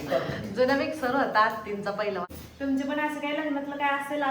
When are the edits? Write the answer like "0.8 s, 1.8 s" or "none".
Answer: 2.3 s